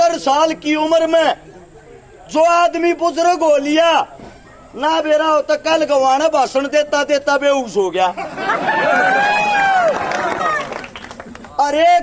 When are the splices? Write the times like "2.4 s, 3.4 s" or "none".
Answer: 10.4 s